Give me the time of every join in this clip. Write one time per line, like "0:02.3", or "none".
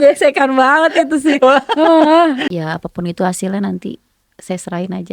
0:02.4